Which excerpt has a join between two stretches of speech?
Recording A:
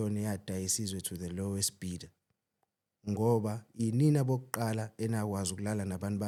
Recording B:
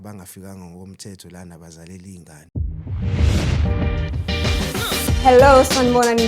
B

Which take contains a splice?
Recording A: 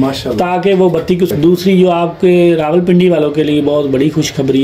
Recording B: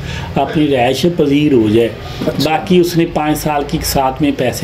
A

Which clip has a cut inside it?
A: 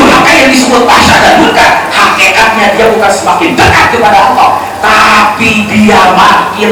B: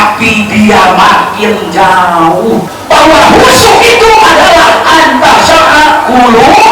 B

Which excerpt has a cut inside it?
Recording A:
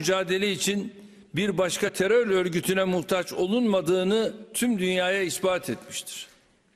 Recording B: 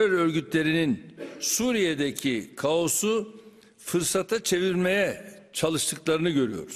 A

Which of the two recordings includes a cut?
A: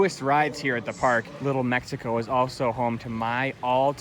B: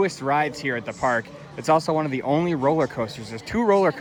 A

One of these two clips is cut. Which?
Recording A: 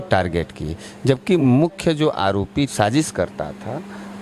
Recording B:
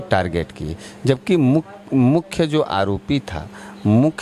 A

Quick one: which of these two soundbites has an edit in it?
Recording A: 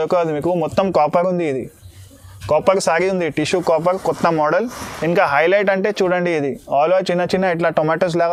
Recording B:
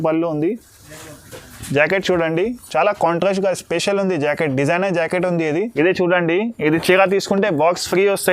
B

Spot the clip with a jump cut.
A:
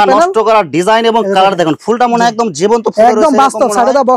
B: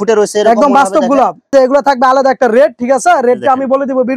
B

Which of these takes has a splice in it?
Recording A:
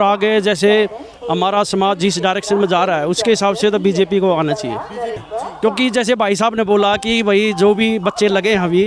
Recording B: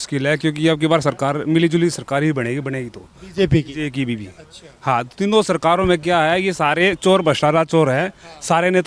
A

